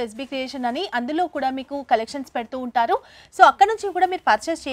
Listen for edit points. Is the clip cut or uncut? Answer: uncut